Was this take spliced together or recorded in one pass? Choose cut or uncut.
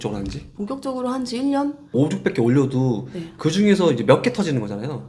uncut